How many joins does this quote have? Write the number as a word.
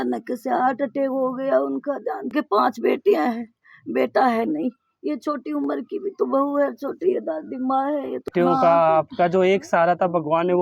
two